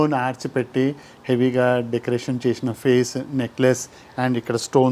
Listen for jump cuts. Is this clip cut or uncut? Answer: uncut